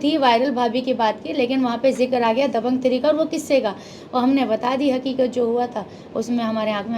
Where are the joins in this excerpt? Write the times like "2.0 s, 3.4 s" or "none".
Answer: none